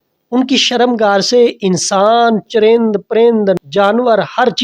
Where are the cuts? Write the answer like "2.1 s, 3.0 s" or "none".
3.6 s